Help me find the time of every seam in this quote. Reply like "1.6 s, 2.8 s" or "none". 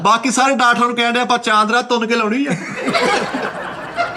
none